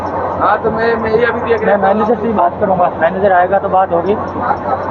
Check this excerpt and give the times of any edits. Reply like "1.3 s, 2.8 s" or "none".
none